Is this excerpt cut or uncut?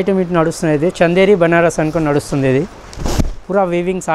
uncut